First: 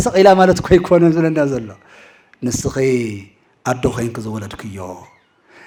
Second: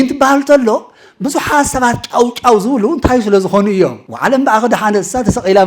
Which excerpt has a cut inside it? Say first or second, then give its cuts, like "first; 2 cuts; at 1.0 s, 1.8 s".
second; 1 cut; at 4.1 s